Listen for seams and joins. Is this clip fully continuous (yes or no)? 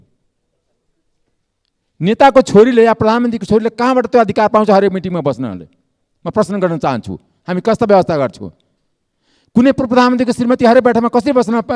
yes